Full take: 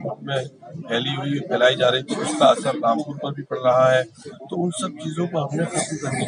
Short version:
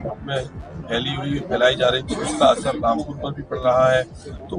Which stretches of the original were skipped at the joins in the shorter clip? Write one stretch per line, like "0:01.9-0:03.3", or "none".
none